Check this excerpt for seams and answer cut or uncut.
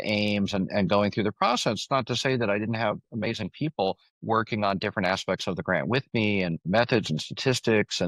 cut